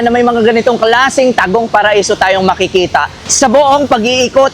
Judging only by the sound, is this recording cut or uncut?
cut